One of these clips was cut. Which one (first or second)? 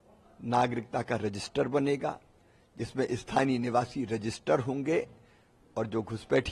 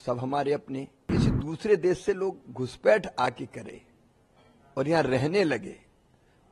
second